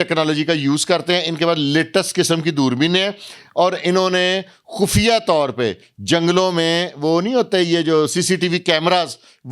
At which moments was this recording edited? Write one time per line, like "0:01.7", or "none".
none